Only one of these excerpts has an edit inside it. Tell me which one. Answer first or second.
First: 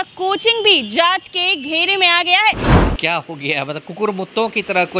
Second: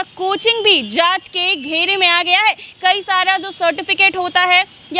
first